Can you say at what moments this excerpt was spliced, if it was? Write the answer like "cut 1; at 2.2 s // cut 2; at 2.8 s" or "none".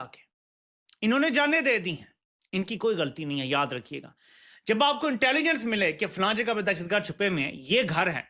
none